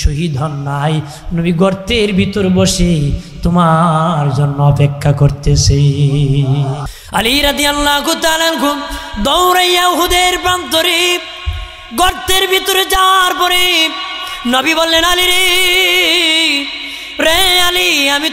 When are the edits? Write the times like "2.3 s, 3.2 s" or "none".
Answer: 6.9 s